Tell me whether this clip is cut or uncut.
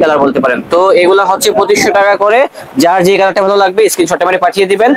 uncut